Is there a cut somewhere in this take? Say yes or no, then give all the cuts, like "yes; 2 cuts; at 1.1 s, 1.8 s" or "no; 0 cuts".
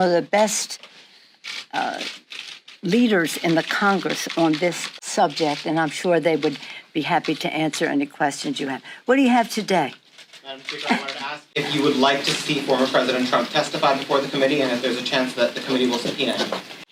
no; 0 cuts